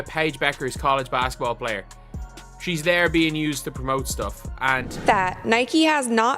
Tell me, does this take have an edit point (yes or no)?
yes